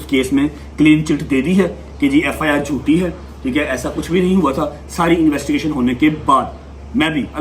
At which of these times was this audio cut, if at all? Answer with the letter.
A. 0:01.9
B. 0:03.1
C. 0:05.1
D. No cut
D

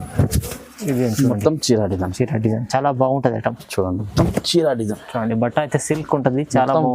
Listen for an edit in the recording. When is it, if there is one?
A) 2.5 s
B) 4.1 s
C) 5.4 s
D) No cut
B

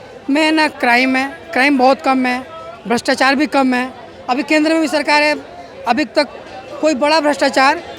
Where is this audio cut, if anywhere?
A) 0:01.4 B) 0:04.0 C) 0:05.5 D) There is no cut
D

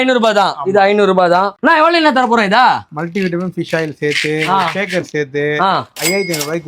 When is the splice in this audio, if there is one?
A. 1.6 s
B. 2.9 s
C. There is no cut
A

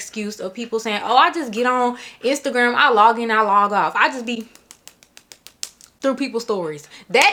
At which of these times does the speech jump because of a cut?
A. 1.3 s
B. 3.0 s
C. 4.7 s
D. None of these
D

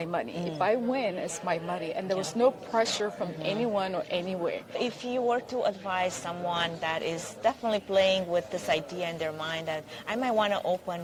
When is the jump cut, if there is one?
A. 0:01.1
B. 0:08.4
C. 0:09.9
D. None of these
D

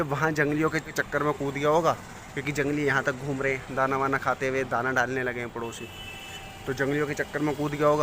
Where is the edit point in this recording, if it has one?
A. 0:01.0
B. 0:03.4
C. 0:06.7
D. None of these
A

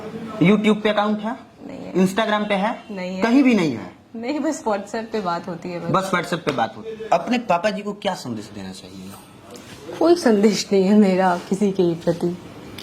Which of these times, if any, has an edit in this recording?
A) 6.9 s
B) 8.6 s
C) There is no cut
A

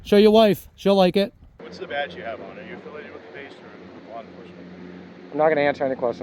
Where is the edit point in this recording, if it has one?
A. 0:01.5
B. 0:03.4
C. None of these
A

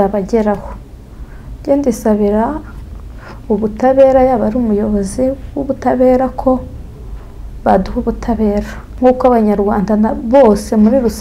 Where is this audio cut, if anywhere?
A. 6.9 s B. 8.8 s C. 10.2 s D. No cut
B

